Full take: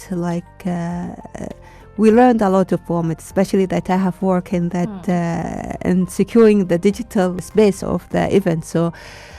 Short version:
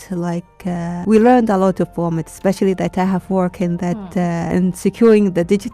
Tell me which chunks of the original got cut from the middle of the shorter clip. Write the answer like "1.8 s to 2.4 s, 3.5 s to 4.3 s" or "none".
1.0 s to 1.9 s, 5.4 s to 5.8 s